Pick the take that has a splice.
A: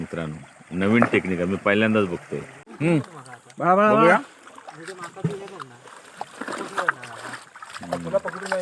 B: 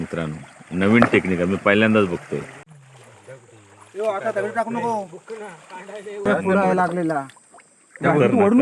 B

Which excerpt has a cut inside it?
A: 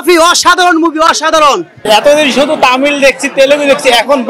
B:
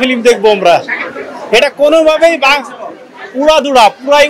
A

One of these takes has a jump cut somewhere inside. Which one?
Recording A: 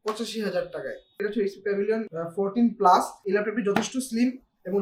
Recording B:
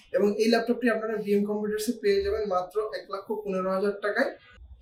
A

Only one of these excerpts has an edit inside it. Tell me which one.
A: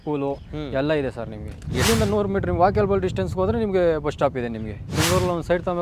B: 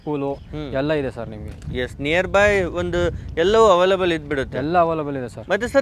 A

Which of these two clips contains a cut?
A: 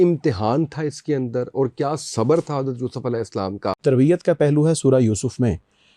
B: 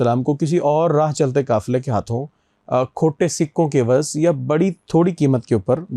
A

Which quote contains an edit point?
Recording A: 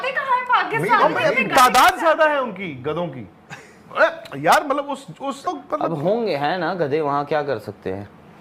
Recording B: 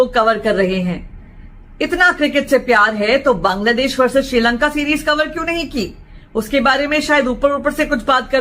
A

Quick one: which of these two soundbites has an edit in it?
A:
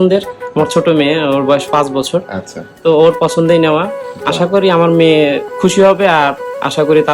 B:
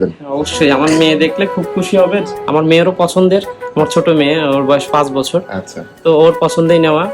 B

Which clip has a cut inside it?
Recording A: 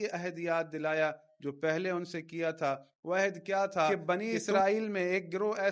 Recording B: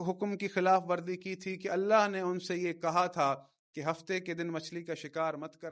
A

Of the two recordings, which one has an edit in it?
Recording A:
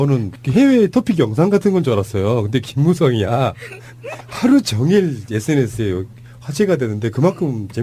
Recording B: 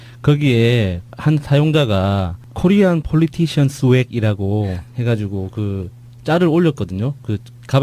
A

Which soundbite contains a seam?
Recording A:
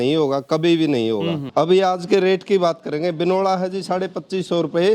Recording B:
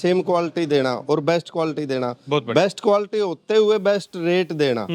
A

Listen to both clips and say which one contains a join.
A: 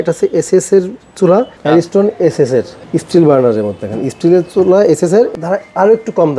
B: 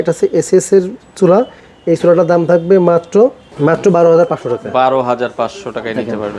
A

